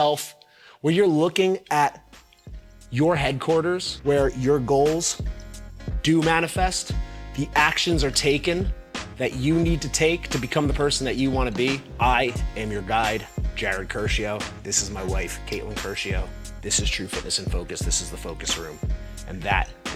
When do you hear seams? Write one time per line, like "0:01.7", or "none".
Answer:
none